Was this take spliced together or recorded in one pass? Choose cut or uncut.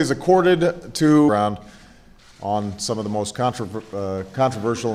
uncut